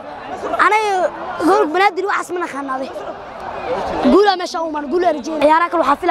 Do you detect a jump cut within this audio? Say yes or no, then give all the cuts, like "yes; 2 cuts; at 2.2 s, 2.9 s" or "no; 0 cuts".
no; 0 cuts